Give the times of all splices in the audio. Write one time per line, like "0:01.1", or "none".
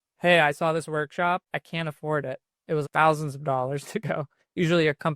0:01.4
0:02.8